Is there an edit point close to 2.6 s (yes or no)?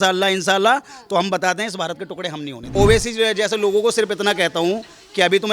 yes